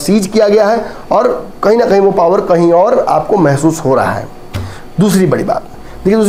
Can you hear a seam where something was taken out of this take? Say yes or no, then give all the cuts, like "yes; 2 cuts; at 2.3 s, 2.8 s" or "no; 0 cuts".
no; 0 cuts